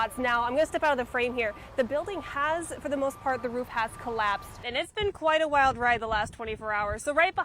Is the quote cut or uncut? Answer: cut